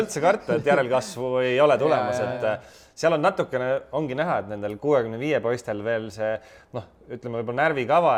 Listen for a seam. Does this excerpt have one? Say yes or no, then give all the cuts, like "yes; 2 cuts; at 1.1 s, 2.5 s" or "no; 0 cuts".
no; 0 cuts